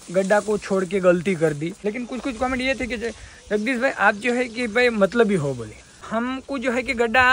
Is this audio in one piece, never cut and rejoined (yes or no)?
no